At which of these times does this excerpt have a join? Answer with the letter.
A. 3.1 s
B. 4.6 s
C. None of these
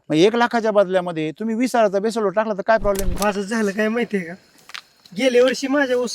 A